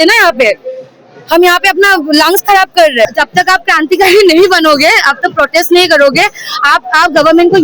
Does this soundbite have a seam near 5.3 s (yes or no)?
no